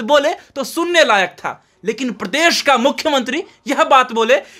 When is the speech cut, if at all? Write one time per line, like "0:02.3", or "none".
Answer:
none